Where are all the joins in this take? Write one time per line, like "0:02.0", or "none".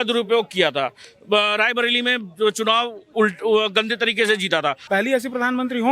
0:04.8